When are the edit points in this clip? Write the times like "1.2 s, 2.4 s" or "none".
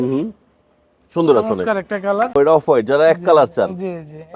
2.4 s